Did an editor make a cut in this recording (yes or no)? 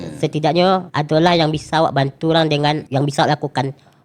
yes